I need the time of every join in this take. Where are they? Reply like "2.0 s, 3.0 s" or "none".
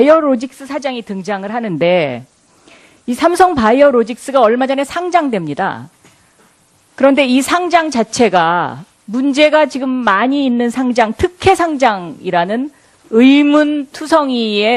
9.6 s